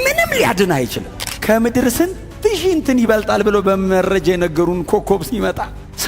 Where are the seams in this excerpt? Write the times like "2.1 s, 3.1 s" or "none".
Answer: 1.3 s